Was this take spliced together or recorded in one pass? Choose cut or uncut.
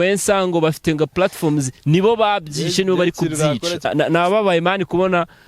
cut